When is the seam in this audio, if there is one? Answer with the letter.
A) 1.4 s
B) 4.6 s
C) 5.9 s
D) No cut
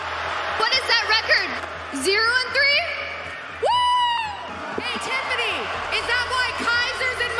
B